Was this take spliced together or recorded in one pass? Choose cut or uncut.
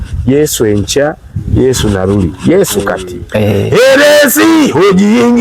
cut